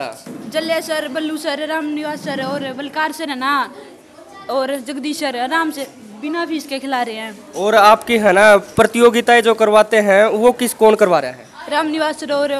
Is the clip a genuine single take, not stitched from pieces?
yes; 0 cuts

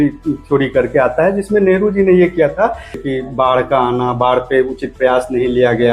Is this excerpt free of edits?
no; 1 cut; at 3.0 s

